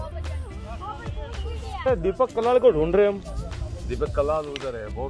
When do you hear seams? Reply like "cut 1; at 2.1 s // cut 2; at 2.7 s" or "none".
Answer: cut 1; at 1.7 s